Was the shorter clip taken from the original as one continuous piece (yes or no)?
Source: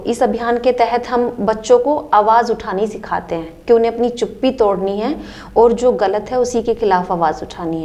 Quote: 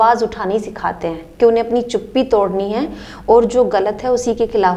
yes